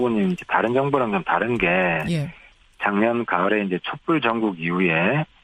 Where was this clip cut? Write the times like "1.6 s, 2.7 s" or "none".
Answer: none